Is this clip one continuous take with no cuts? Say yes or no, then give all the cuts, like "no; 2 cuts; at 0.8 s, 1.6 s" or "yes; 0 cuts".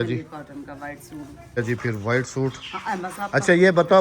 no; 1 cut; at 1.6 s